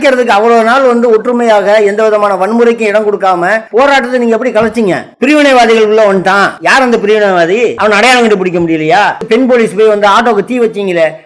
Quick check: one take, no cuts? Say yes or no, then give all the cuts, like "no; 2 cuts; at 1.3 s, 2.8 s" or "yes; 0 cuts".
no; 5 cuts; at 3.6 s, 5.1 s, 6.6 s, 7.8 s, 9.2 s